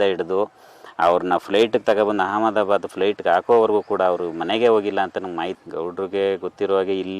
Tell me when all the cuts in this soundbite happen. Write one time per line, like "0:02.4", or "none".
0:05.6